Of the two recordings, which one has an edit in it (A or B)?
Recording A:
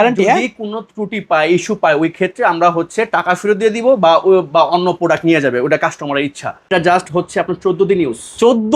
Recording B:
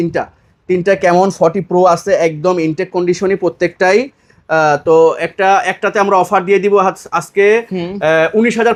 A